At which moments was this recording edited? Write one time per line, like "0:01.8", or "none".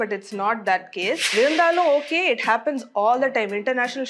0:01.2